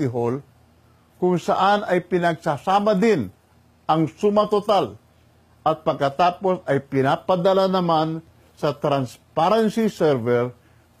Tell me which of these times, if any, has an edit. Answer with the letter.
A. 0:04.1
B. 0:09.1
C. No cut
C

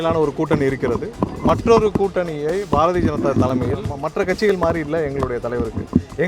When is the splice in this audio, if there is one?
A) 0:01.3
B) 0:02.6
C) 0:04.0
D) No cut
C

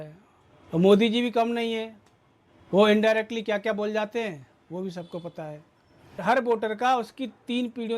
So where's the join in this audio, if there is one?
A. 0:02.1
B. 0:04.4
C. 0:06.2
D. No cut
C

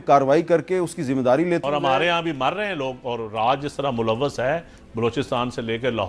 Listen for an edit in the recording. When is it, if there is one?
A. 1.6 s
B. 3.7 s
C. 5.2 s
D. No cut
A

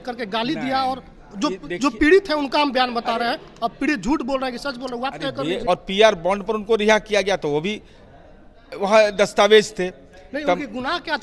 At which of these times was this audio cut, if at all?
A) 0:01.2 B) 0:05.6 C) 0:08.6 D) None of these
B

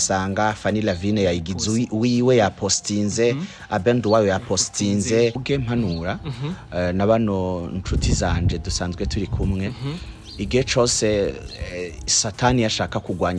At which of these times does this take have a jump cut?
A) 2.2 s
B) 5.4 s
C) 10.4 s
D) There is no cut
B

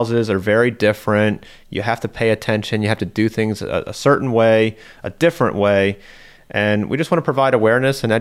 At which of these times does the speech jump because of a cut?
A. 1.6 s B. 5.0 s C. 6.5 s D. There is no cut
C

